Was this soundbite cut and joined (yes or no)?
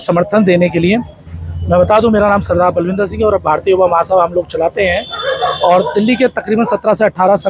no